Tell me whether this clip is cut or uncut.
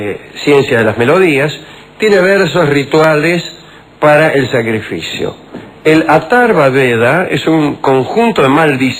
uncut